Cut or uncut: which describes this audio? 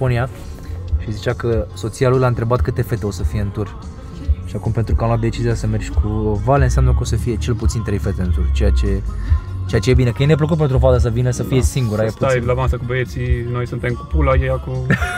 uncut